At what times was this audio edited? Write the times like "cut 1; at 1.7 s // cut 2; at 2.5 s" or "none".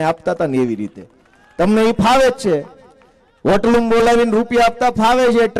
none